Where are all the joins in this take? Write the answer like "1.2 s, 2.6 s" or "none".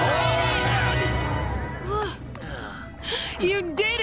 0.9 s

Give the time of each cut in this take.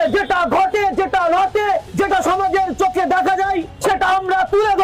1.9 s, 3.7 s

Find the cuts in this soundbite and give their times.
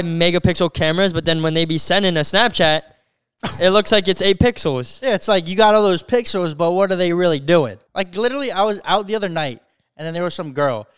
7.8 s

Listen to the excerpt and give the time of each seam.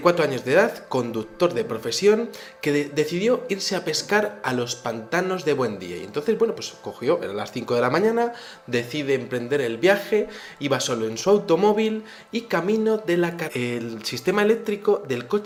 none

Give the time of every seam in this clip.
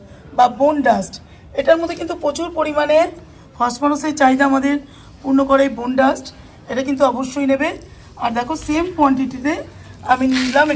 none

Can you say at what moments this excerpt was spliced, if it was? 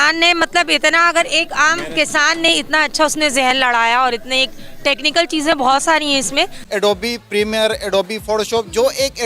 6.6 s

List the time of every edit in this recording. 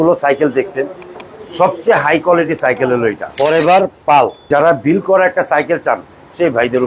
3.3 s, 4.5 s

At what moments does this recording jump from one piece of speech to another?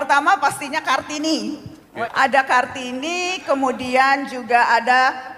1.8 s

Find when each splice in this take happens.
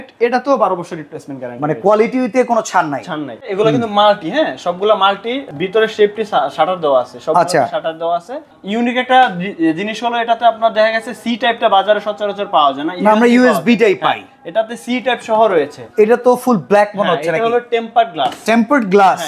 3.5 s, 5.5 s, 8.6 s, 15.8 s

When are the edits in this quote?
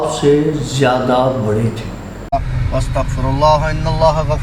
2.2 s

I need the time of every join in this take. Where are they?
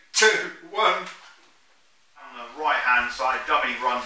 2.4 s

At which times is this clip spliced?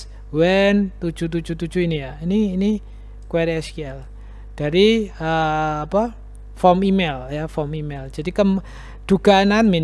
none

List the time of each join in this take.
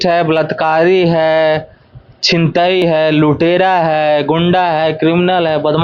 none

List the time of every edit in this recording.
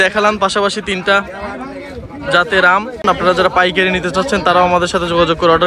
3.0 s

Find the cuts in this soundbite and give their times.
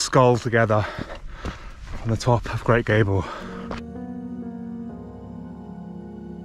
none

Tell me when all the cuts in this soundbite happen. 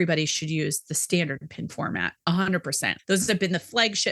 2.9 s

